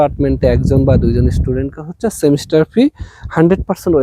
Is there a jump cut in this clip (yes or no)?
no